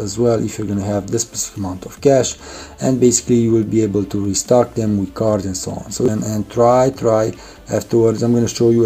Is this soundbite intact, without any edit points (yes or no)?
no